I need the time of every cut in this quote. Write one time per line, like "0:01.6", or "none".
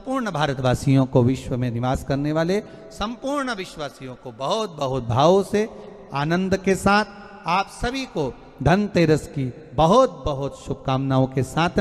none